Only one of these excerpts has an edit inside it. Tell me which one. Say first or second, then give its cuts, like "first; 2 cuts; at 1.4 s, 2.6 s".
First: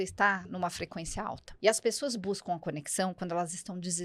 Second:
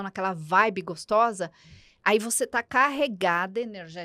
first; 1 cut; at 1.5 s